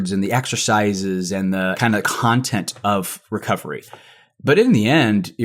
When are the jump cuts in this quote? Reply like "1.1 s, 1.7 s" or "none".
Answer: 1.8 s